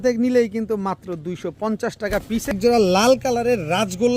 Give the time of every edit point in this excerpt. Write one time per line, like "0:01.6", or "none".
0:02.5